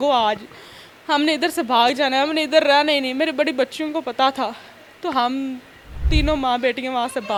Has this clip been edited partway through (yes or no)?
no